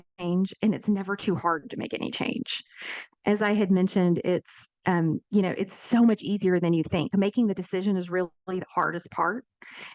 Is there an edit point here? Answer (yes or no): no